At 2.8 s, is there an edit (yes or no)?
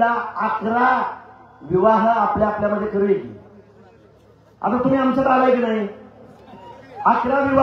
no